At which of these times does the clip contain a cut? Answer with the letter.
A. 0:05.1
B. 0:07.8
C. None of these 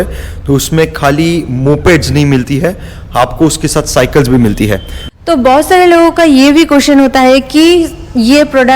A